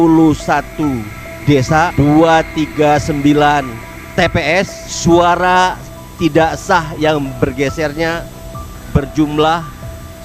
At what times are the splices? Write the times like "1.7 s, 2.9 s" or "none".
1.9 s, 4.8 s